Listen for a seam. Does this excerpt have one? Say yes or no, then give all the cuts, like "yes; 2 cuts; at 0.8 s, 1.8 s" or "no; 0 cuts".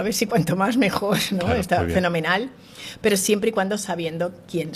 no; 0 cuts